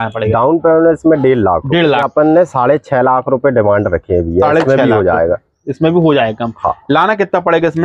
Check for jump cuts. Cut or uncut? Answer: cut